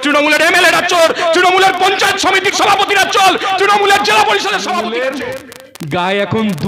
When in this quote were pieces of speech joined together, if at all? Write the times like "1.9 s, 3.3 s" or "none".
4.8 s

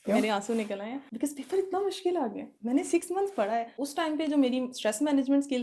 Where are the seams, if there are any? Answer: 1.0 s, 2.5 s, 3.8 s

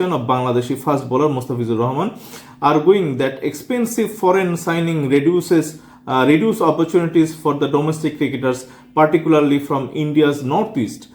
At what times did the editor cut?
none

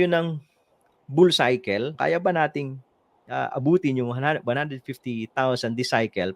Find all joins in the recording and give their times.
1.9 s

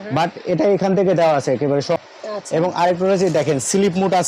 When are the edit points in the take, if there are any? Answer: 2.0 s

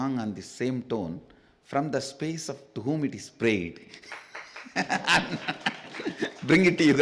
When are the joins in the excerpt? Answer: none

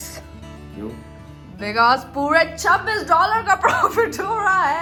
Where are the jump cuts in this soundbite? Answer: none

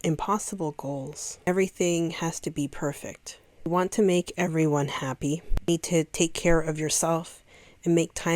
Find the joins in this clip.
1.5 s, 3.7 s, 5.5 s

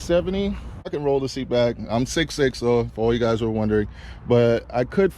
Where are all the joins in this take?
0.9 s

